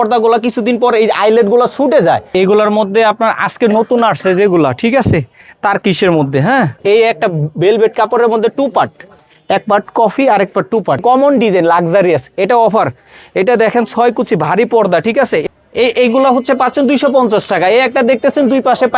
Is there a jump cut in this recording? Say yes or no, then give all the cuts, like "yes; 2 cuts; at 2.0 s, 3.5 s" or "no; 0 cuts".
yes; 4 cuts; at 2.3 s, 6.8 s, 11.0 s, 15.4 s